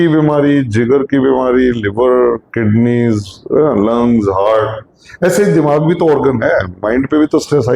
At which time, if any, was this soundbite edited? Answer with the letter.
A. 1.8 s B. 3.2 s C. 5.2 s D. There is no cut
D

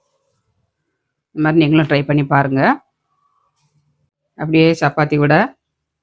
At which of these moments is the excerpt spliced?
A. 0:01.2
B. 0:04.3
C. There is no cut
B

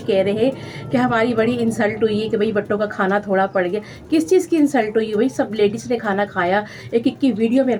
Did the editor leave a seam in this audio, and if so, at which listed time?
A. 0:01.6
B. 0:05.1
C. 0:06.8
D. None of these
D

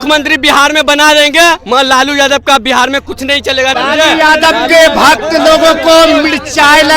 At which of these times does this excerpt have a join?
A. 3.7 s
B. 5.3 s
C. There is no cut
A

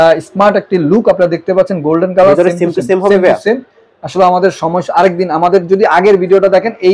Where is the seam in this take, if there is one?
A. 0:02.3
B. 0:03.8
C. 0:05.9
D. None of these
D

